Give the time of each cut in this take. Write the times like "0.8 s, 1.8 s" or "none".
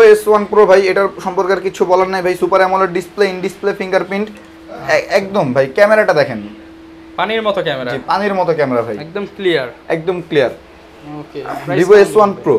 none